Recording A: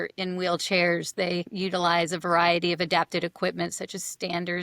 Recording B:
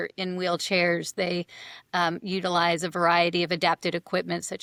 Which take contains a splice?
A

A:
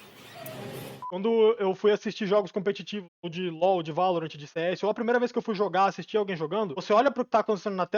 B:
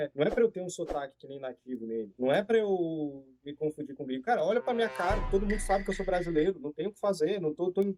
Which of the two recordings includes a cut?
A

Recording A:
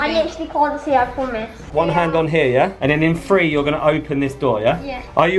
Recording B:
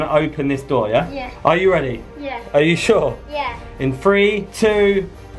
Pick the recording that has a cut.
A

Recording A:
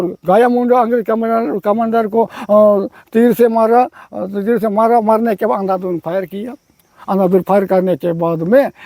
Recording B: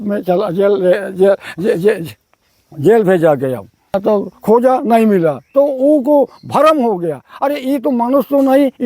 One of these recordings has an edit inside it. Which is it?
B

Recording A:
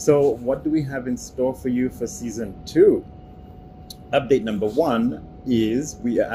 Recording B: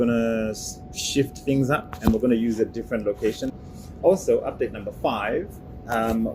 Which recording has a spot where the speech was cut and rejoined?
B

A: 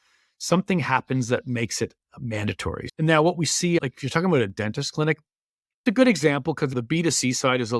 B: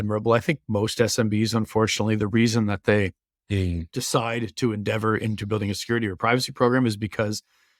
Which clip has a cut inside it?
A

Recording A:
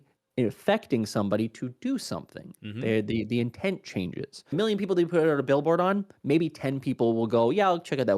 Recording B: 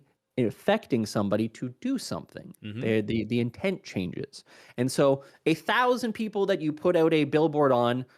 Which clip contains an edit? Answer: A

